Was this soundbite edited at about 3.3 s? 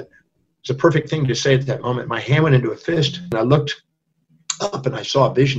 yes; 1 cut; at 3.3 s

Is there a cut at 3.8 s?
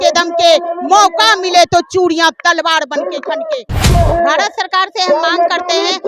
yes; 1 cut; at 3.8 s

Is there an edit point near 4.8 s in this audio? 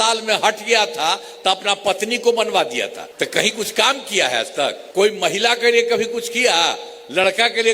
yes; 2 cuts; at 3.0 s, 4.8 s

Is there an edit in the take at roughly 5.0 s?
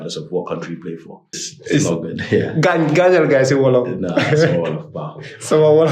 no; 1 cut; at 1.5 s

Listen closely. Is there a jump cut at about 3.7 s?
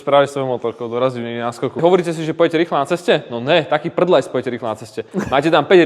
no; 1 cut; at 1.8 s

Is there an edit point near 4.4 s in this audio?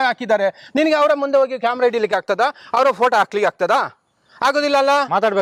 no; 0 cuts

